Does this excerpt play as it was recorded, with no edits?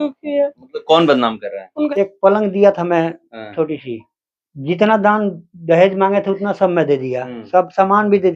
no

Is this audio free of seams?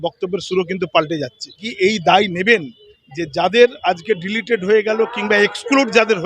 no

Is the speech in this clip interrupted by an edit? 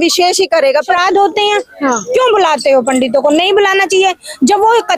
yes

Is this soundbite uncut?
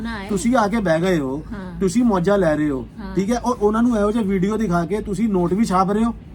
yes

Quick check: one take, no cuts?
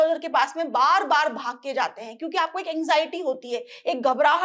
yes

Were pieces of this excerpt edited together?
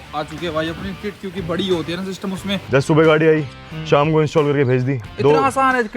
yes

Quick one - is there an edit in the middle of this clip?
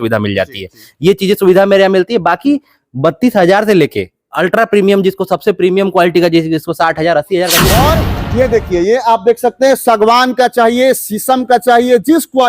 yes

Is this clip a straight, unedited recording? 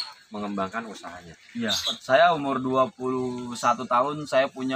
no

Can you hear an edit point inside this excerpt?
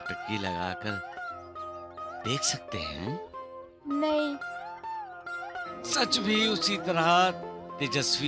no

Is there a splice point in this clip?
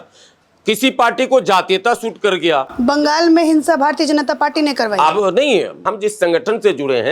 yes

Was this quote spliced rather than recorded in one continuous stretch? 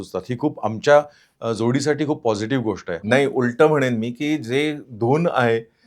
yes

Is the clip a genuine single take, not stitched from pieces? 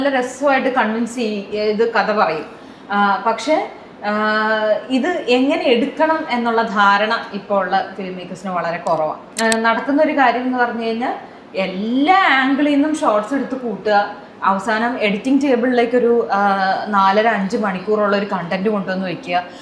no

